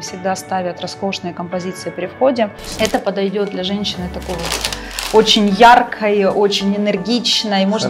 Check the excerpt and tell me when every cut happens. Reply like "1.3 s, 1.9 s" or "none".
2.6 s